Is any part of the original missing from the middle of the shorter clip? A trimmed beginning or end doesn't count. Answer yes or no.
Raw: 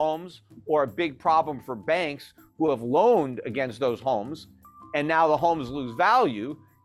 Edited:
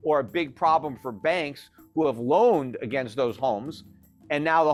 no